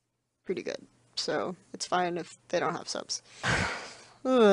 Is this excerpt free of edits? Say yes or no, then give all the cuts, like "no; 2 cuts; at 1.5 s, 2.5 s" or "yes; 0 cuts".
no; 1 cut; at 3.2 s